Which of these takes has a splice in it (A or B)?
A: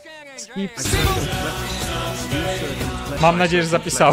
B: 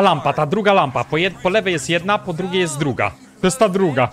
A